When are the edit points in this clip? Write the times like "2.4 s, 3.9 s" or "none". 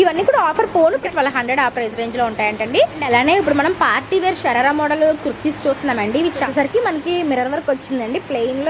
1.0 s, 3.0 s, 6.5 s